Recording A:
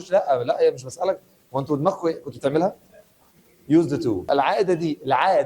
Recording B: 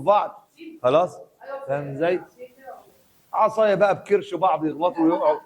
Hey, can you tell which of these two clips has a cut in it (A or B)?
A